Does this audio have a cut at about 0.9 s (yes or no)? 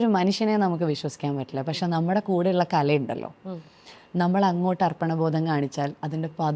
no